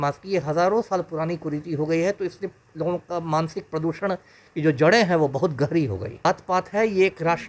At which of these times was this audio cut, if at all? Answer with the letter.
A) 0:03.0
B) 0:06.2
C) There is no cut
B